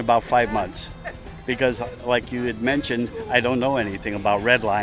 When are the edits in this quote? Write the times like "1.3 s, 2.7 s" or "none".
none